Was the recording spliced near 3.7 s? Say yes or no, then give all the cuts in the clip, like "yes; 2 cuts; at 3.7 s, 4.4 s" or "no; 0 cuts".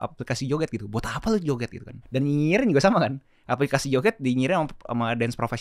no; 1 cut; at 2.0 s